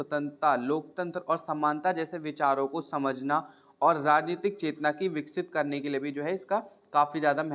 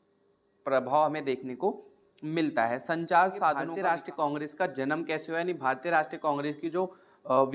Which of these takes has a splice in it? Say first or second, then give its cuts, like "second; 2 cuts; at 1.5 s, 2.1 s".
second; 1 cut; at 3.7 s